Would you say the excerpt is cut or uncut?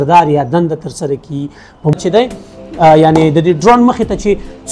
cut